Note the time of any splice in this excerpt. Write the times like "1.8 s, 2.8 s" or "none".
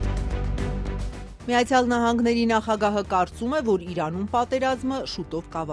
1.3 s